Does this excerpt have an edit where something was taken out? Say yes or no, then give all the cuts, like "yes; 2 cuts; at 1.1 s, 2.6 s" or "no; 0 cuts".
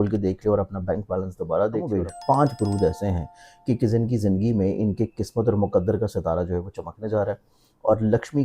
yes; 1 cut; at 1.9 s